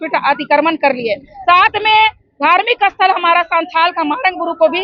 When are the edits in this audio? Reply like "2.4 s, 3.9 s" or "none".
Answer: none